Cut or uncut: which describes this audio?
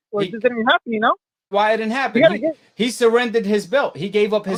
uncut